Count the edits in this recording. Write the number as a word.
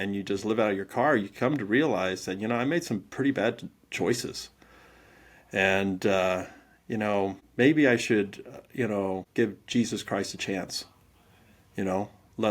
two